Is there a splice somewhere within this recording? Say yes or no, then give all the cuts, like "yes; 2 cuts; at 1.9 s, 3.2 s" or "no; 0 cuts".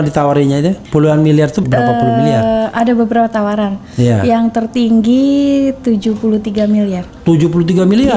yes; 1 cut; at 1.6 s